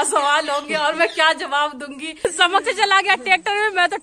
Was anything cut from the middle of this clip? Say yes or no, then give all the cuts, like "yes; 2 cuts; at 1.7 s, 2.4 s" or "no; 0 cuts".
yes; 1 cut; at 2.2 s